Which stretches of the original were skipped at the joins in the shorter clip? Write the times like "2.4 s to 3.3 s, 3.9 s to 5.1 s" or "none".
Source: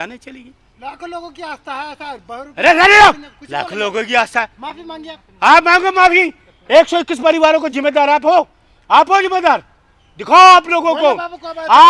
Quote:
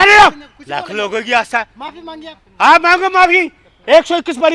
none